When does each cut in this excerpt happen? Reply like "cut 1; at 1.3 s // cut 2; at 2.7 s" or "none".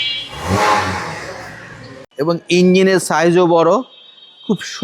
cut 1; at 2.0 s